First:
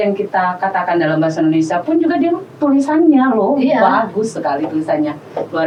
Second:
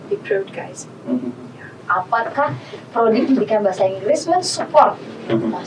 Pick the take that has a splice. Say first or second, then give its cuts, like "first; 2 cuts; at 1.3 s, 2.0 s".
second; 1 cut; at 1.8 s